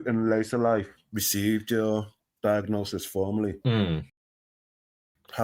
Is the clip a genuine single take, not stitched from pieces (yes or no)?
yes